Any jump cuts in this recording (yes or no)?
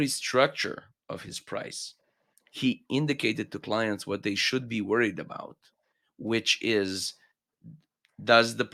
no